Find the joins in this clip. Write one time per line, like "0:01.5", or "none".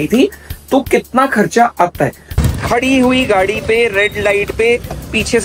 0:02.4